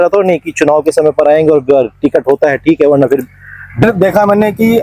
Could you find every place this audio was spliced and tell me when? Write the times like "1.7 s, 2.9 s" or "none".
3.8 s